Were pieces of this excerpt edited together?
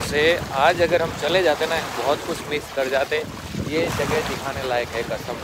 no; 0 cuts

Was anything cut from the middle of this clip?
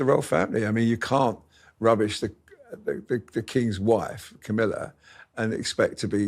no; 0 cuts

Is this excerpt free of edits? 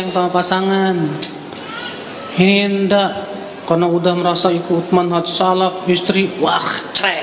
yes; 0 cuts

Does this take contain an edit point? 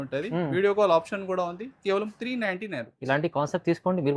no; 0 cuts

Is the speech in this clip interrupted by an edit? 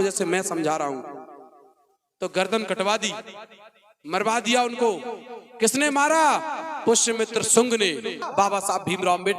yes; 1 cut; at 8.3 s

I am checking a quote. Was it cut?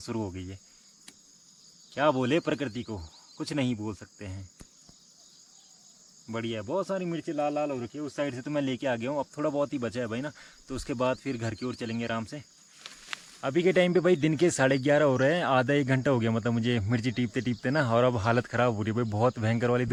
no; 0 cuts

